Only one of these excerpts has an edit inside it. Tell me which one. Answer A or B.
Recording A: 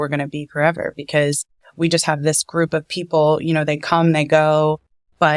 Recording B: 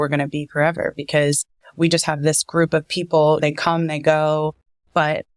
B